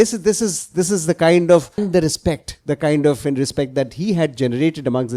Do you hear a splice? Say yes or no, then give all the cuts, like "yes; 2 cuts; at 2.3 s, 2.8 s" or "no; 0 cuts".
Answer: yes; 1 cut; at 1.7 s